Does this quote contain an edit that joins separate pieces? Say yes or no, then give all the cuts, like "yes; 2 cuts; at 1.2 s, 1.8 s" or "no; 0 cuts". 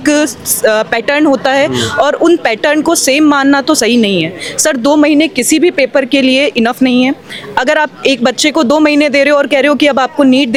no; 0 cuts